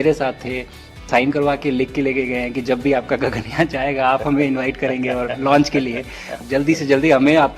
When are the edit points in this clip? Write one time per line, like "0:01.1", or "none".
0:01.0
0:06.4